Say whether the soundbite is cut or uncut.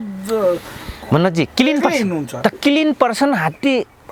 uncut